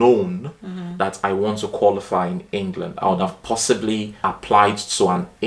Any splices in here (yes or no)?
yes